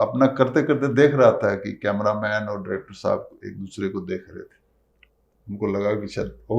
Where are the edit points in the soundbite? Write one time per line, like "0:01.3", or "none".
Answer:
none